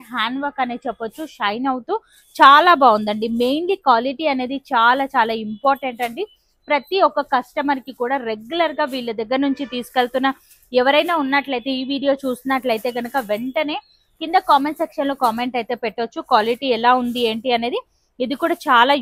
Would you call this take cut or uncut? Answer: uncut